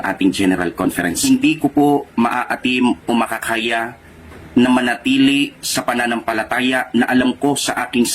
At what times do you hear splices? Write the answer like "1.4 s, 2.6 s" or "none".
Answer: 1.1 s, 5.2 s